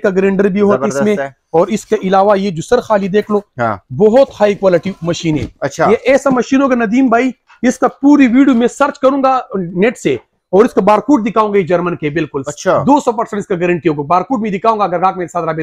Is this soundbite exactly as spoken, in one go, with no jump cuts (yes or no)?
yes